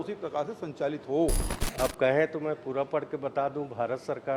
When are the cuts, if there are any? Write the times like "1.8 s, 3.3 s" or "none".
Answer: 1.5 s